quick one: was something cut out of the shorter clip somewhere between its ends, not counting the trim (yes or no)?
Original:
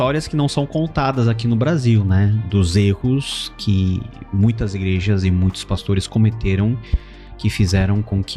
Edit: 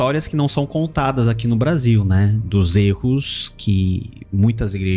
no